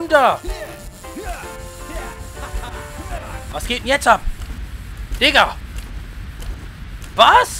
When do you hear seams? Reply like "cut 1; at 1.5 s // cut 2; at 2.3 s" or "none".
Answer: cut 1; at 3.5 s